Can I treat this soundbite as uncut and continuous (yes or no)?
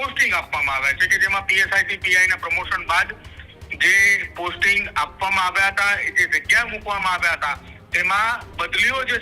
yes